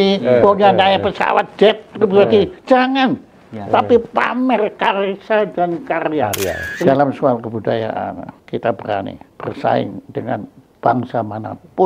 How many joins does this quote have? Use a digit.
3